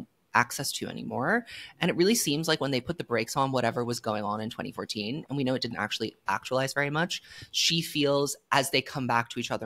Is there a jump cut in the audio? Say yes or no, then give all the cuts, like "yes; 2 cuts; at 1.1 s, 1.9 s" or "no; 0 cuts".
no; 0 cuts